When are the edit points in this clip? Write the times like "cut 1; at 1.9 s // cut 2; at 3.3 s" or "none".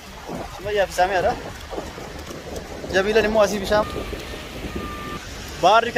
none